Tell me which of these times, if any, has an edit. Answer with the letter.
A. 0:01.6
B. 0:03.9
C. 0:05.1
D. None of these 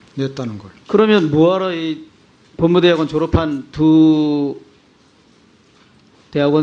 A